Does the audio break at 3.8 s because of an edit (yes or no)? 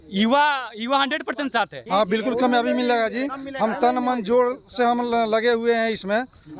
no